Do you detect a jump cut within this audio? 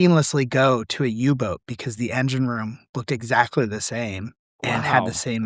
no; 0 cuts

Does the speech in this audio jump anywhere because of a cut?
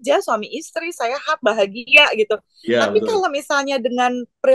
no; 0 cuts

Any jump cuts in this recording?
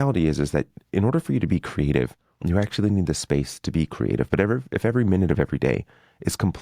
yes; 1 cut; at 2.3 s

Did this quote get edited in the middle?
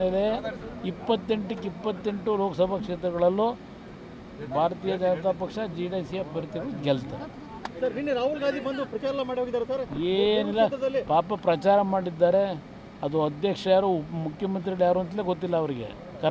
no; 0 cuts

